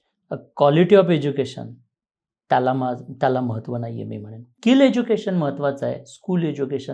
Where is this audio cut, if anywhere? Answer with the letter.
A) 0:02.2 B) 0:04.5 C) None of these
B